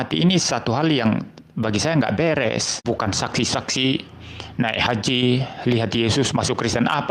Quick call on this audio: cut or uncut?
cut